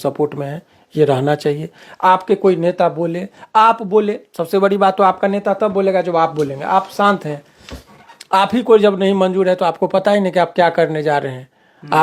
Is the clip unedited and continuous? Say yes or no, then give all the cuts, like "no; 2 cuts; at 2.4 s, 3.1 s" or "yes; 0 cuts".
yes; 0 cuts